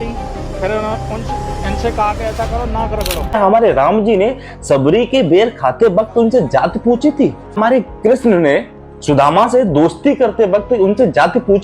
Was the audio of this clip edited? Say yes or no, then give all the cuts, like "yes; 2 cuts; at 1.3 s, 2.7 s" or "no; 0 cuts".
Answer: yes; 2 cuts; at 3.4 s, 7.6 s